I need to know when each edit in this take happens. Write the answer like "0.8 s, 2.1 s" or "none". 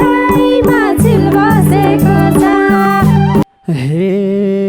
3.4 s